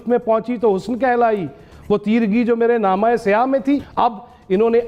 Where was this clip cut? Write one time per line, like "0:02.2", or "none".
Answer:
none